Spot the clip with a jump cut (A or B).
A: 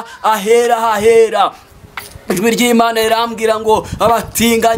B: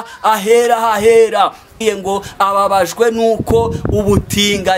B